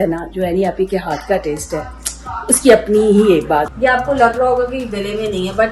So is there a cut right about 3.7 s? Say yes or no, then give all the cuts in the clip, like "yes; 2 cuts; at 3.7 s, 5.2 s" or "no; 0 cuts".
yes; 1 cut; at 3.7 s